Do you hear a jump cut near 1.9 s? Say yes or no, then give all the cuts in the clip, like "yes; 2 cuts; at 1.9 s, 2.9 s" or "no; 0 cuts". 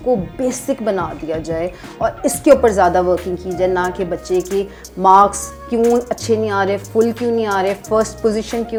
no; 0 cuts